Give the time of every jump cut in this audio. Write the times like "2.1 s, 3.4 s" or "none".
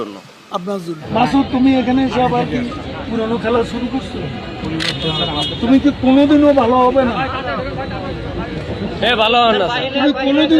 1.0 s